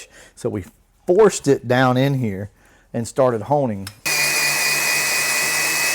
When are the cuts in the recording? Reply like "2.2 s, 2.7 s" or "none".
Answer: 4.1 s